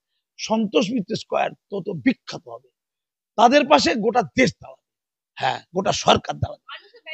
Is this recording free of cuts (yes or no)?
yes